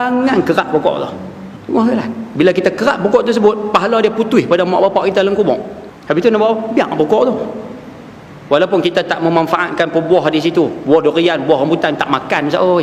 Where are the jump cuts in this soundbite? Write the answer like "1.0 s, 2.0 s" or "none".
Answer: none